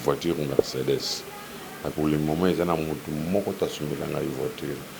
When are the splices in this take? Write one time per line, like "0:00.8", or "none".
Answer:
0:01.9